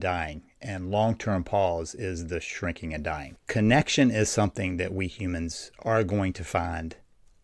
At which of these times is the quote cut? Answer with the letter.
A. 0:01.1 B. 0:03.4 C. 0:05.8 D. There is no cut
B